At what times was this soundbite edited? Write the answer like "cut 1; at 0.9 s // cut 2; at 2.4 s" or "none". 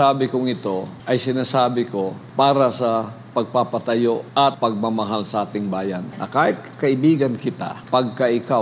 cut 1; at 0.9 s // cut 2; at 2.2 s // cut 3; at 4.4 s // cut 4; at 6.1 s // cut 5; at 7.7 s